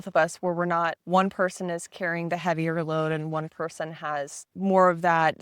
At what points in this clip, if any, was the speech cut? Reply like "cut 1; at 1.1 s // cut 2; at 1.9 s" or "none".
cut 1; at 1.0 s // cut 2; at 4.4 s